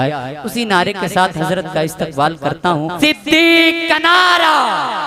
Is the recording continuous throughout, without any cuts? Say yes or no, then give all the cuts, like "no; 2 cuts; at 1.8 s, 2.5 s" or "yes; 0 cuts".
no; 1 cut; at 2.9 s